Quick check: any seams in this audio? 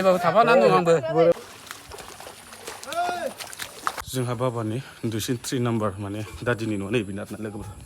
yes; 2 cuts; at 1.3 s, 4.0 s

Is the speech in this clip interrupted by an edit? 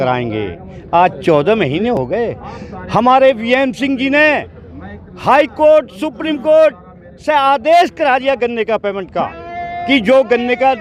no; 0 cuts

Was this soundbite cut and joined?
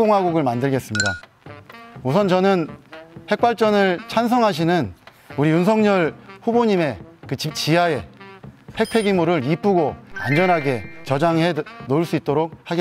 no; 0 cuts

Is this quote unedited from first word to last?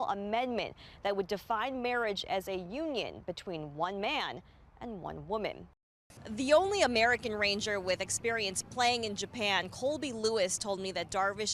no; 1 cut; at 6.1 s

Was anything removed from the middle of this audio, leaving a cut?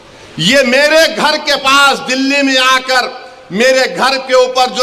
no; 0 cuts

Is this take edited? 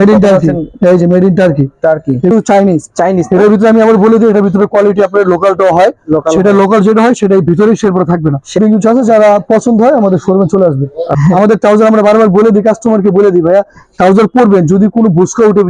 yes; 3 cuts; at 2.3 s, 8.6 s, 11.1 s

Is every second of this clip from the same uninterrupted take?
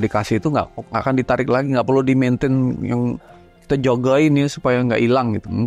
yes; 0 cuts

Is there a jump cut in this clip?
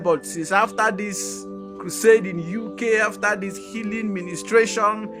no; 0 cuts

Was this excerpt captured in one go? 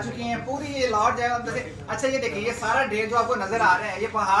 yes; 0 cuts

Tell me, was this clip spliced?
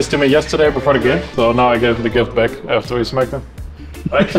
yes; 1 cut; at 1.3 s

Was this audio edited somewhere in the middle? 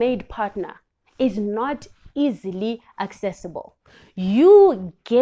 no; 0 cuts

